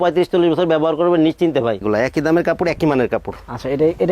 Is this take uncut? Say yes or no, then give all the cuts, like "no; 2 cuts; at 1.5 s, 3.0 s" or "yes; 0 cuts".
no; 1 cut; at 1.8 s